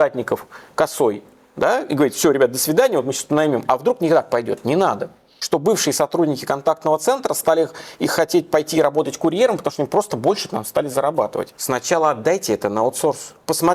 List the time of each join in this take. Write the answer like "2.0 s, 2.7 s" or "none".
5.3 s, 11.6 s